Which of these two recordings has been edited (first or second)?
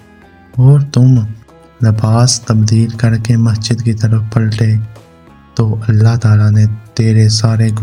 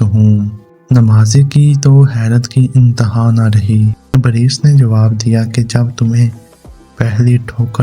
second